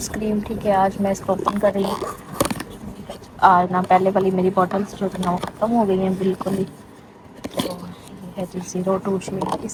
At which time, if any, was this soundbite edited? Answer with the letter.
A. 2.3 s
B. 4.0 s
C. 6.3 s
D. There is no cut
D